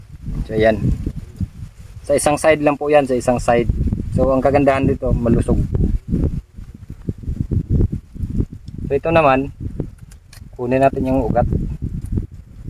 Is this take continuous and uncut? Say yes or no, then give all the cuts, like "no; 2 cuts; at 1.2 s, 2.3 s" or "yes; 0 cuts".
yes; 0 cuts